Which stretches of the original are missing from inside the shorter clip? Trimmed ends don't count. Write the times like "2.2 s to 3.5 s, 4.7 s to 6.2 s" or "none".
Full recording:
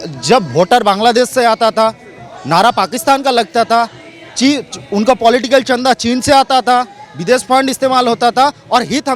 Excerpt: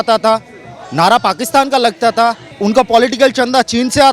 4.0 s to 4.8 s